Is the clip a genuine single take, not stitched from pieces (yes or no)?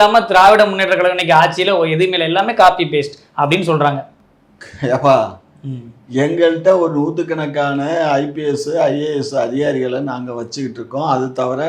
yes